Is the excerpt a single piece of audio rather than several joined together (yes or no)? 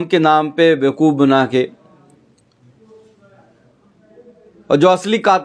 yes